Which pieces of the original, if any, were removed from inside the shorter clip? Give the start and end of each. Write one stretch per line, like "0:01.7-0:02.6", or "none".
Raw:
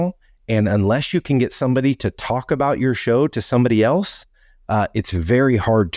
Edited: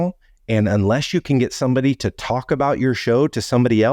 none